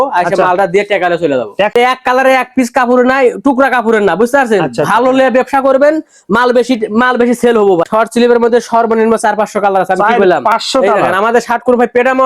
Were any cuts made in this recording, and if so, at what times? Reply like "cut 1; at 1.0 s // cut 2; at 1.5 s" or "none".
cut 1; at 1.7 s // cut 2; at 7.9 s